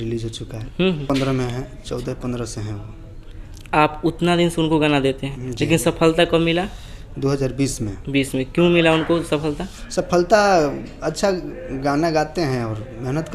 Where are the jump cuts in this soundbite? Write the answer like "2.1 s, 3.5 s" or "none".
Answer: 1.1 s